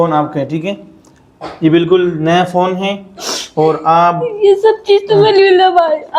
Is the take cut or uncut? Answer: uncut